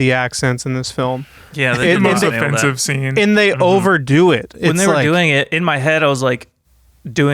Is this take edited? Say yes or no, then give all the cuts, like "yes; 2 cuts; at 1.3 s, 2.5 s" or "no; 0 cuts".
yes; 2 cuts; at 1.4 s, 5.0 s